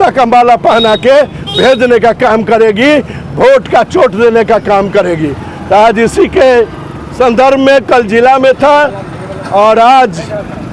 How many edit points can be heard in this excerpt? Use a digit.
0